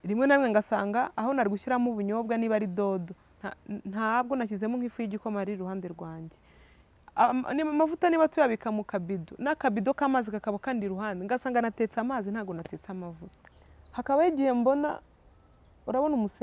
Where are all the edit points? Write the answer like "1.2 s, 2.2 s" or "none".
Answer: 13.5 s

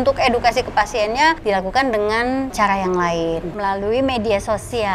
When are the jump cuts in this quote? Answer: 1.4 s, 2.5 s, 3.5 s

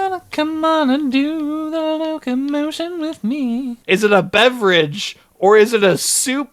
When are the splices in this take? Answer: 3.7 s

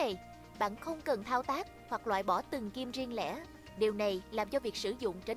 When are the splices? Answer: none

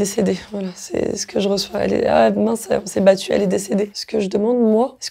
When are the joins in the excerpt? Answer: 3.9 s

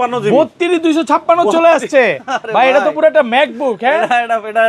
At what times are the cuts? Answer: none

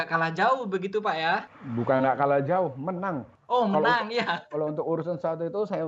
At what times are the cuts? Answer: 1.6 s, 3.3 s

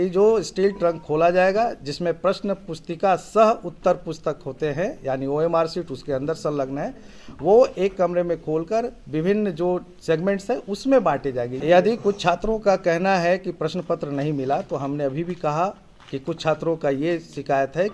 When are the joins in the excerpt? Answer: 11.5 s

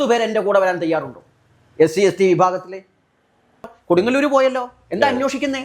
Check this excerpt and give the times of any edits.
3.7 s

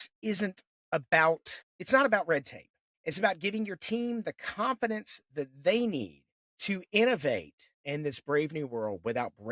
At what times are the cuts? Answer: none

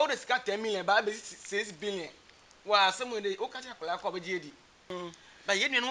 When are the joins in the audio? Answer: 4.9 s

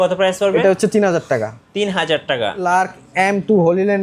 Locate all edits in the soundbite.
2.6 s

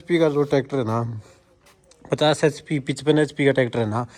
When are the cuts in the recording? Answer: none

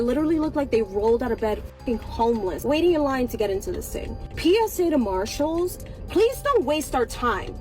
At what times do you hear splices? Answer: 5.7 s

